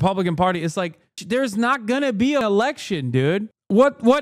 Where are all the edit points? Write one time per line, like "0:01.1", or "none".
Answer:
0:01.2
0:02.4

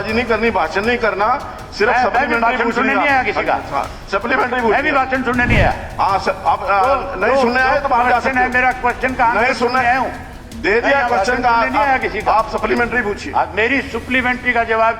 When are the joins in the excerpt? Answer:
none

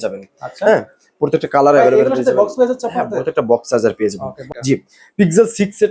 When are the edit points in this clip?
0:04.5

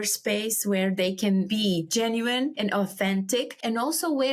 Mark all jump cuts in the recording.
none

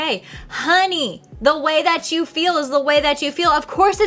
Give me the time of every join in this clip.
none

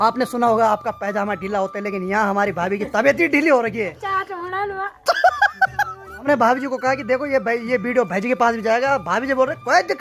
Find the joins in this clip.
0:04.0
0:06.3

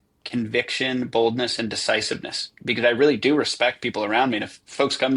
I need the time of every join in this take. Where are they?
none

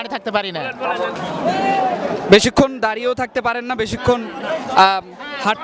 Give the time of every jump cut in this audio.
0:01.1

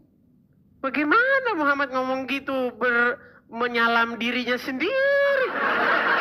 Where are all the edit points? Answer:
none

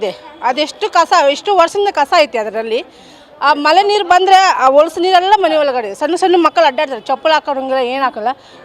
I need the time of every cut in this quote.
none

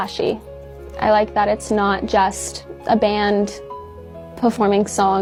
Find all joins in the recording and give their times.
none

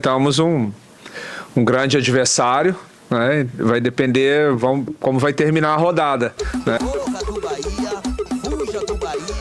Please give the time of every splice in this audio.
0:06.4

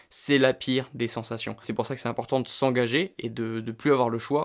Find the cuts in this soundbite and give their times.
0:01.7

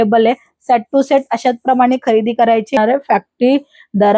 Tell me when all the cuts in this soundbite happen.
0:02.8

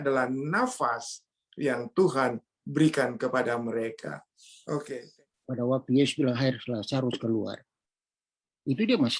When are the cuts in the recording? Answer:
0:05.1

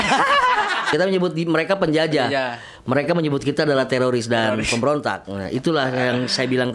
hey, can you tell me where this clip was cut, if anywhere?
0:00.9

